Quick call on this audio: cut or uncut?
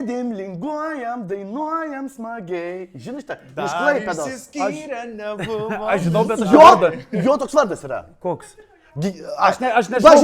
uncut